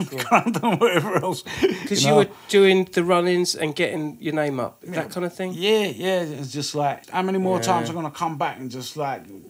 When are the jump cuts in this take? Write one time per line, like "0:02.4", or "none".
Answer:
0:07.0